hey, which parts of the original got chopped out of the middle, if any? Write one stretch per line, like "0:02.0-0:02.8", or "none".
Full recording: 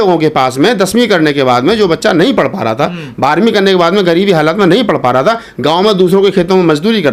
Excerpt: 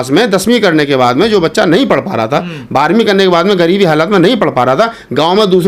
none